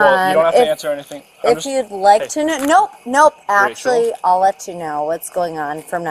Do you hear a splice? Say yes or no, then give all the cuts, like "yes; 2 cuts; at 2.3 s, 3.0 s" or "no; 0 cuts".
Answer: no; 0 cuts